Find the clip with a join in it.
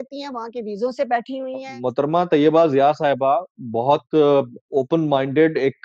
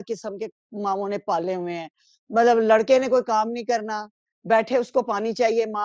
first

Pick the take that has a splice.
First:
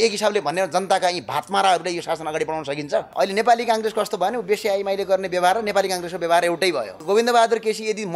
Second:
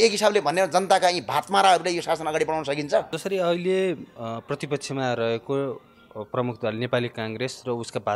first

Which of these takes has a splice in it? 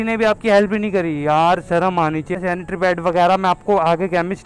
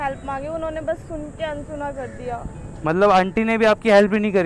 first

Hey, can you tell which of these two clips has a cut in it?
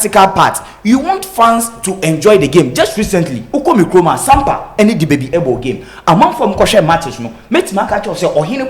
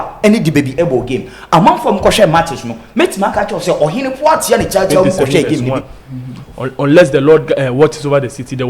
second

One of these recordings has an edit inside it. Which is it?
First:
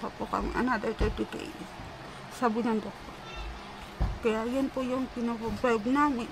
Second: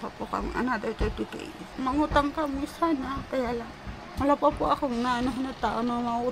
second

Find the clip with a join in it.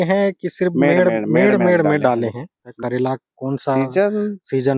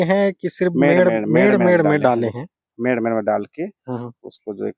first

